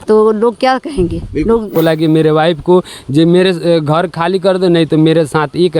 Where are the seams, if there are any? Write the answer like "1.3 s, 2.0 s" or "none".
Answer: 1.7 s